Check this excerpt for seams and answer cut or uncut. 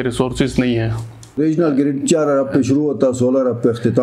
cut